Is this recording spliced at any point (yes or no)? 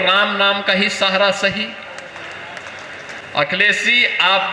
yes